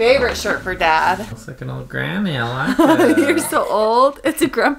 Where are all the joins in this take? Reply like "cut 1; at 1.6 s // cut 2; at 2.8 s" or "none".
cut 1; at 1.4 s